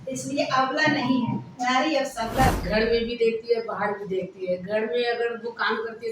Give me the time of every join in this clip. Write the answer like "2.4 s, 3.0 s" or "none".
2.6 s